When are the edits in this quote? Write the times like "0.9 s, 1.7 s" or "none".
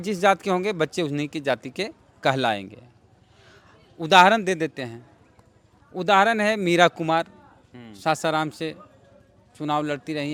none